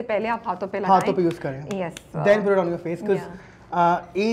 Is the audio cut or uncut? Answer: uncut